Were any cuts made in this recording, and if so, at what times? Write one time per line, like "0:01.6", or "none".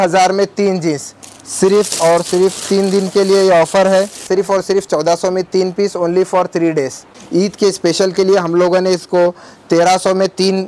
0:04.2
0:07.0

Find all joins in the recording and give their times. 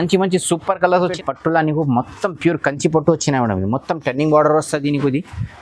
0:01.0

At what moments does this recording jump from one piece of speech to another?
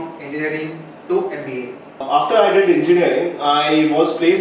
0:02.0

